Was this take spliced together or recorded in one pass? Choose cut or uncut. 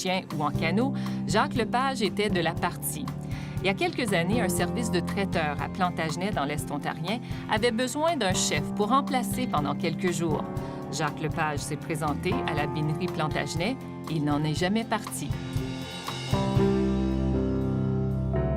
cut